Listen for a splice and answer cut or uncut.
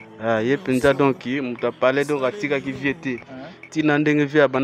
uncut